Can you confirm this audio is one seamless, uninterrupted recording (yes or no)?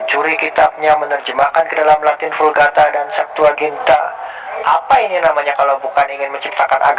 yes